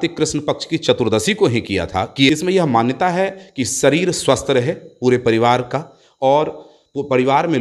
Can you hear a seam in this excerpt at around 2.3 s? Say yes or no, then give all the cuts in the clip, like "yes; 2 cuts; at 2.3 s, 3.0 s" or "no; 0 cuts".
yes; 1 cut; at 2.3 s